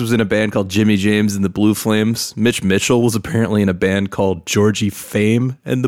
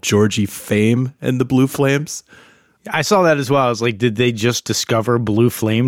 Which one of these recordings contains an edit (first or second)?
second